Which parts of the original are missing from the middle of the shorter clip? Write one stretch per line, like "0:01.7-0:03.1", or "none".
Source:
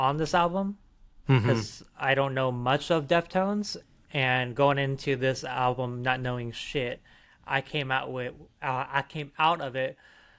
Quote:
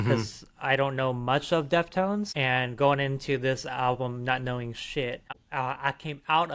0:03.7-0:04.1
0:07.1-0:08.5